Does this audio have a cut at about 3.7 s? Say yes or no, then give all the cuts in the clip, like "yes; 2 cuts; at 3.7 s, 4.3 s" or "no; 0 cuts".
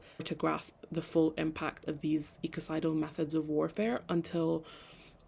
no; 1 cut; at 1.8 s